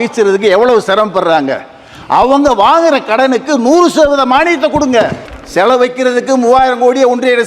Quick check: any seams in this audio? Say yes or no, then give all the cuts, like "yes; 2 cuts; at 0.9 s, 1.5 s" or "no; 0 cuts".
yes; 1 cut; at 5.2 s